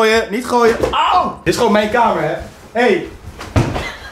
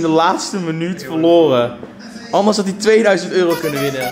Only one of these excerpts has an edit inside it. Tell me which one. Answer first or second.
first